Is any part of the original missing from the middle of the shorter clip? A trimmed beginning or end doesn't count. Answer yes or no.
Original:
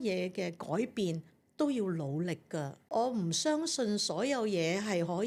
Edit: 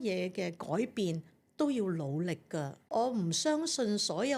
no